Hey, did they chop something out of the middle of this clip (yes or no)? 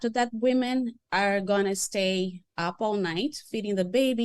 yes